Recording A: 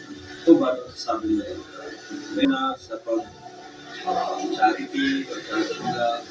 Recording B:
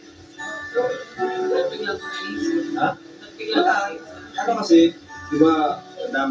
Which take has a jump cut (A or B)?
A